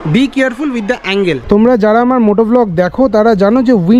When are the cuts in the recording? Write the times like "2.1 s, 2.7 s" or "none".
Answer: 1.4 s